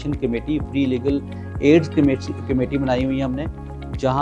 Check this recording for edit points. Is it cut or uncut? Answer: uncut